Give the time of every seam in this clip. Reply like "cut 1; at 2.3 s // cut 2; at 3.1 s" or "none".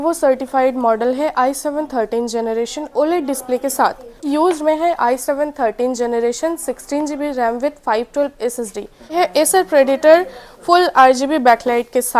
cut 1; at 4.3 s // cut 2; at 9.1 s